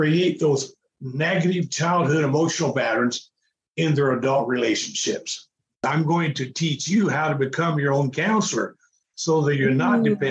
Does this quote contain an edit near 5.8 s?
yes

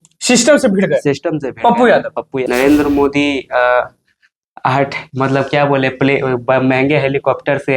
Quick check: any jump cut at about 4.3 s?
no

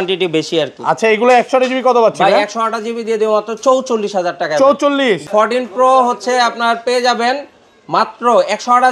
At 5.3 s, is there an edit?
yes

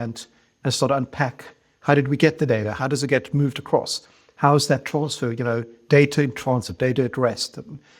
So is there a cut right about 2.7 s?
yes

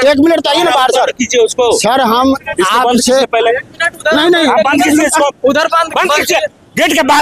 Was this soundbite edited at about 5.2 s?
no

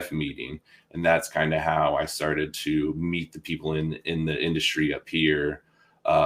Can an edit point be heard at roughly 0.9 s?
no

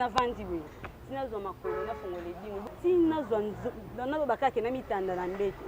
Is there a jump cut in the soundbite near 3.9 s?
no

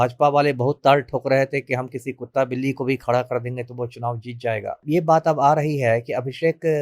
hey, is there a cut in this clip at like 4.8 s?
yes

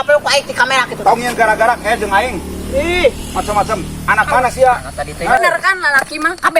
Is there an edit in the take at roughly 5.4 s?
yes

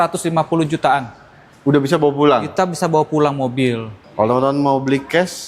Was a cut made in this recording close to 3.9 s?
yes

